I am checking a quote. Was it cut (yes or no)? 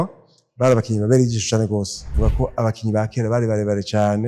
yes